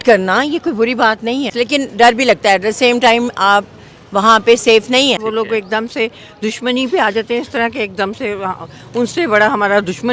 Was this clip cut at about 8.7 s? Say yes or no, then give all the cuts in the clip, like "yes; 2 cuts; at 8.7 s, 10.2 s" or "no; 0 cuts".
no; 2 cuts; at 1.5 s, 5.2 s